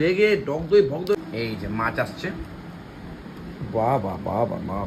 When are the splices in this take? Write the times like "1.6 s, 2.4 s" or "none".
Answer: 1.1 s

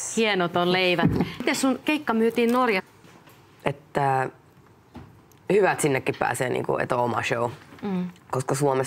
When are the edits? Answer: none

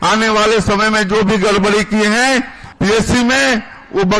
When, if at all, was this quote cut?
2.6 s

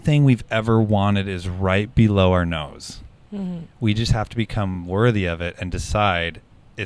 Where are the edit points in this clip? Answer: none

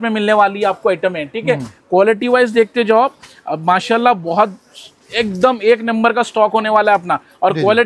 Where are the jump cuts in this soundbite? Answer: none

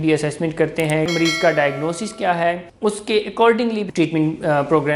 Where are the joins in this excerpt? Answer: 1.1 s, 2.7 s, 3.8 s

